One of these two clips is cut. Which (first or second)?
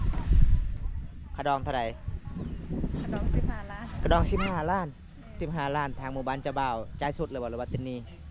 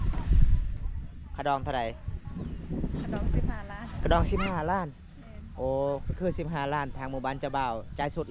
first